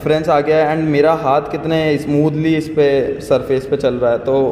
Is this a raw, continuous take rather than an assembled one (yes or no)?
yes